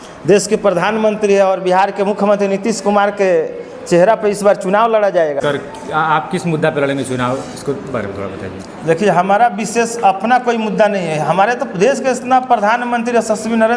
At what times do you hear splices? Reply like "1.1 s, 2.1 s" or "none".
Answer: 5.4 s